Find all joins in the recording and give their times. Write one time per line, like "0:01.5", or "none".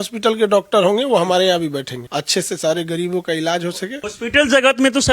0:02.0
0:04.0